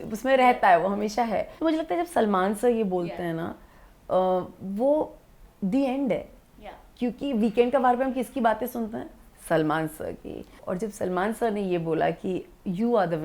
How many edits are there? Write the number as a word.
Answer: two